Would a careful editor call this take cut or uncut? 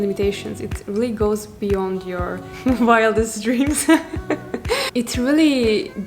cut